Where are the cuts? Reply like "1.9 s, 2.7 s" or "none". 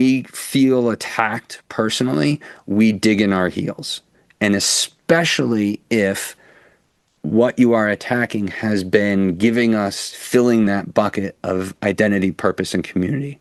none